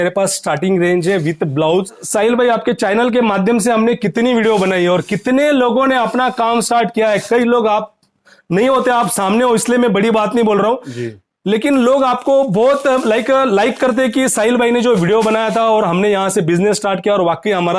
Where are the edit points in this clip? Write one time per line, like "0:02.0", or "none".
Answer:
0:02.0